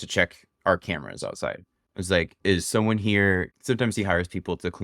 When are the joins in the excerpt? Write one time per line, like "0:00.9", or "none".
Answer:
0:03.6